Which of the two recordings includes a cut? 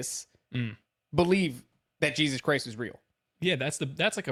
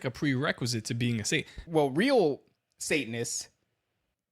second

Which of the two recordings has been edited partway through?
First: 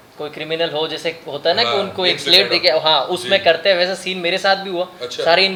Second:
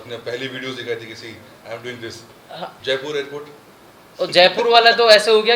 second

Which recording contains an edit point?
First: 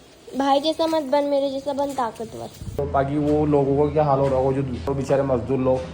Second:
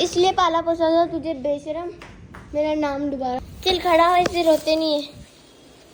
first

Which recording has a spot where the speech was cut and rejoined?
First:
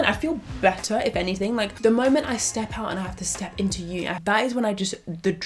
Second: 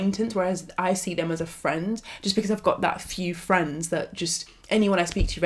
first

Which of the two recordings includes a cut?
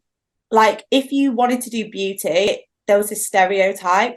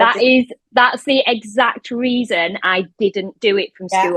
first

